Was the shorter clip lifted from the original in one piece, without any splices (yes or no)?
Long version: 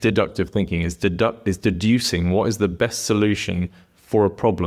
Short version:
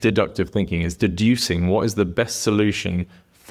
no